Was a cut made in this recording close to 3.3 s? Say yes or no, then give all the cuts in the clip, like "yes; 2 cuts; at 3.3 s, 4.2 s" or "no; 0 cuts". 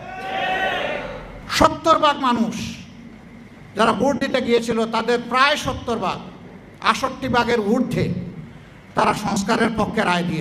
no; 1 cut; at 1.4 s